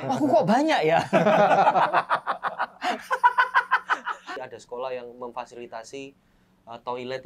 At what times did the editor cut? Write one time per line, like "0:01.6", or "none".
0:04.3